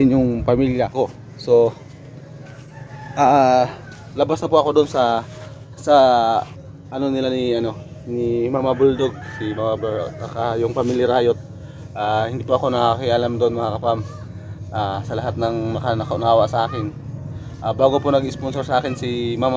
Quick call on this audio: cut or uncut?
cut